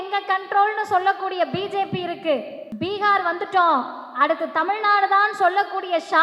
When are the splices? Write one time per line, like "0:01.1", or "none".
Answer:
0:02.6